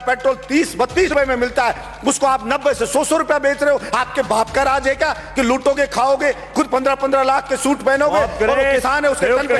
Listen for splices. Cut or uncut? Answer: cut